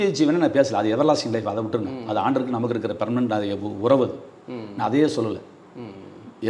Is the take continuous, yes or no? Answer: yes